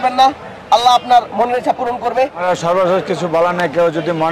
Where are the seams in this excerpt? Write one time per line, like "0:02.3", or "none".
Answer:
0:02.4